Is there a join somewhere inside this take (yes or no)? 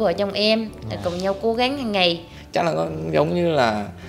yes